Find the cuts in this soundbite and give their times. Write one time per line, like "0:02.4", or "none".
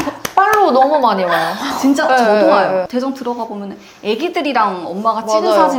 none